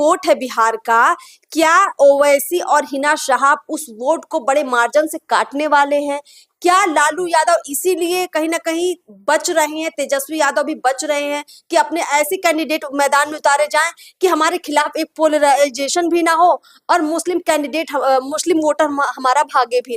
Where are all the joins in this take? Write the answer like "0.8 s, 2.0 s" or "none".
none